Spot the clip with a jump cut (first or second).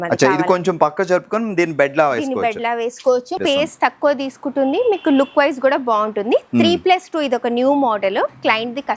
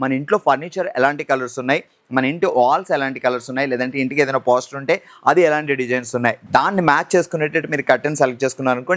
first